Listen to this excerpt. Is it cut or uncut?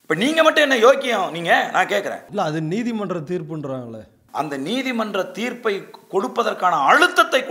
cut